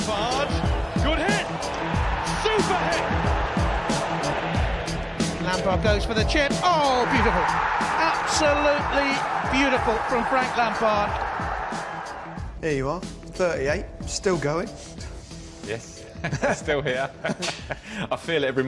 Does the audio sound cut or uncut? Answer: cut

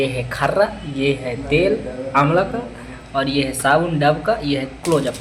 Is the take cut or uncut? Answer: uncut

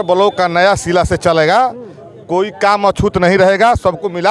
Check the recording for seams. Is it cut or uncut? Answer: uncut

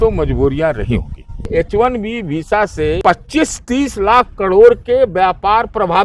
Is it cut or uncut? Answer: cut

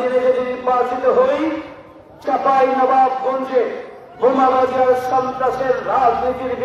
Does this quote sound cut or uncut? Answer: uncut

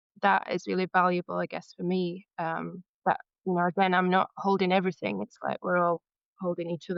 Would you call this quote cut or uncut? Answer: uncut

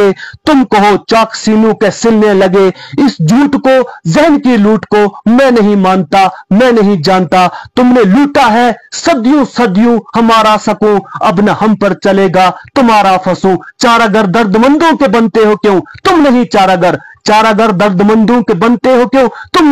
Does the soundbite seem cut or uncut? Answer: uncut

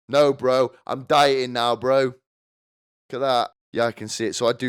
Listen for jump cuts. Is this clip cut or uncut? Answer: cut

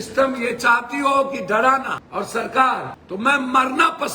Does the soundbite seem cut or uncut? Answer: cut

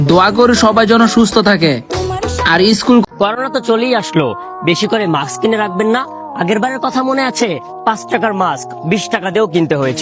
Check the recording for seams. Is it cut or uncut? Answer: cut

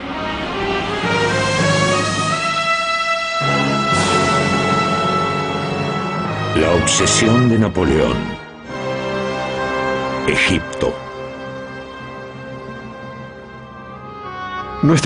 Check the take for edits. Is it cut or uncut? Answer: uncut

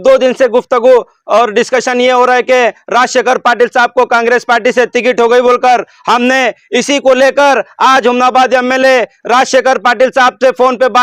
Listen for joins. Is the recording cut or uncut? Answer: uncut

